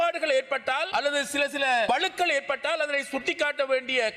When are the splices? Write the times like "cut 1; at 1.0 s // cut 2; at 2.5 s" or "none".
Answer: none

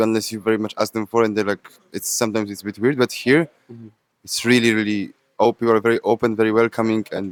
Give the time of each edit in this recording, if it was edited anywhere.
none

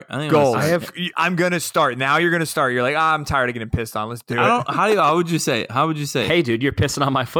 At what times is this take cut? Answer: cut 1; at 4.2 s // cut 2; at 6.3 s

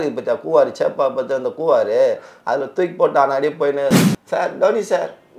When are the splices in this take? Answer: cut 1; at 4.1 s

